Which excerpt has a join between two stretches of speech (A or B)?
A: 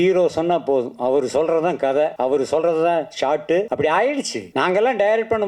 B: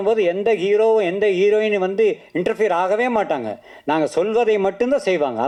A